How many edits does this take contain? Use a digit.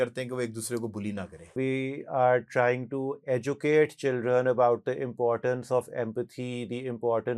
1